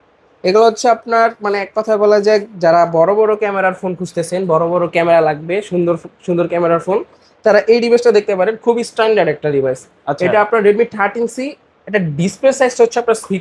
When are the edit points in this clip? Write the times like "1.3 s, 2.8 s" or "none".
none